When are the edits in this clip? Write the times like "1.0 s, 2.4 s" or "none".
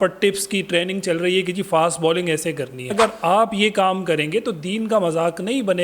2.9 s